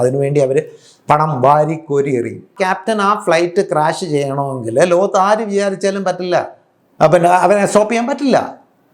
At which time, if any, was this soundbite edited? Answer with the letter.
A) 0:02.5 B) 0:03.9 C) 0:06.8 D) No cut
A